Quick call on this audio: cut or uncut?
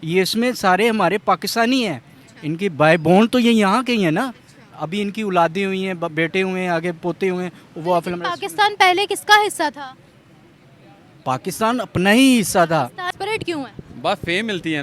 cut